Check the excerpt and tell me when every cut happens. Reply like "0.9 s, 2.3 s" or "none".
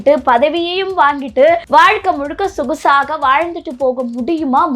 1.6 s